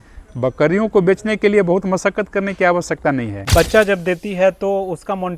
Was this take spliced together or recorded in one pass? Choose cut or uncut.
cut